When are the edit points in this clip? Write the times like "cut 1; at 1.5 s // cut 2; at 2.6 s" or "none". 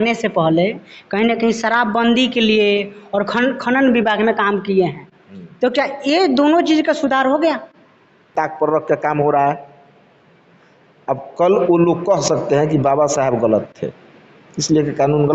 cut 1; at 8.3 s